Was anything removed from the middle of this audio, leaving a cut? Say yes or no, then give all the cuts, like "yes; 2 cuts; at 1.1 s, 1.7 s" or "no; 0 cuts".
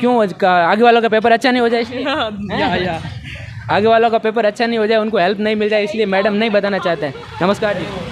no; 0 cuts